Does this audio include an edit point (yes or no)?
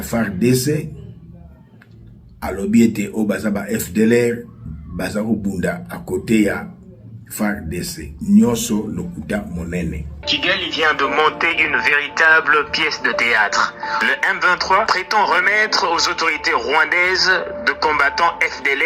yes